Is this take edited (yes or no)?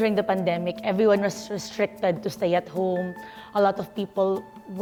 no